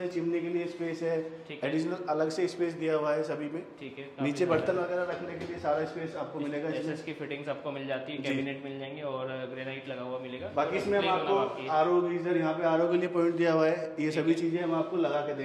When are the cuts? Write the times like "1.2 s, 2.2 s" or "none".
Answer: none